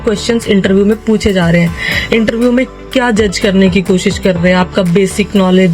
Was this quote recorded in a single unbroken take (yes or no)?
yes